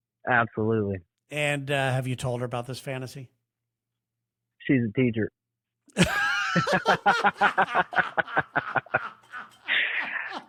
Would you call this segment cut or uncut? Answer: uncut